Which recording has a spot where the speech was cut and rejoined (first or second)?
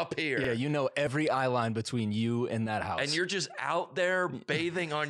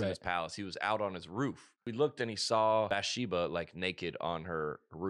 second